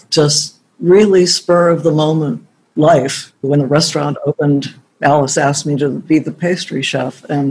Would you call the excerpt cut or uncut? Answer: cut